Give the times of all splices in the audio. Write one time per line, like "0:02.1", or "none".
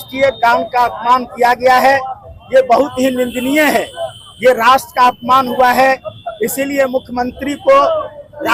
none